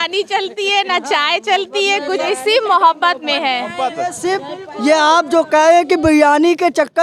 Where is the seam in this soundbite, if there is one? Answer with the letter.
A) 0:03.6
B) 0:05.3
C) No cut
C